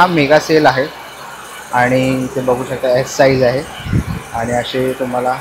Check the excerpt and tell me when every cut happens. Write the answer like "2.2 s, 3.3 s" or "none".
none